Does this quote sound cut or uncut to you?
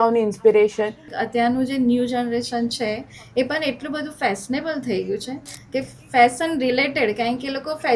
cut